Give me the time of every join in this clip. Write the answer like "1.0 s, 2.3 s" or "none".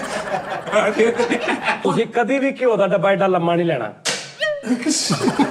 1.8 s